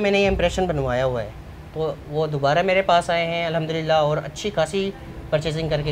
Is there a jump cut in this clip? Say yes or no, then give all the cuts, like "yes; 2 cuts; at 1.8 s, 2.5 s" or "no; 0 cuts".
no; 0 cuts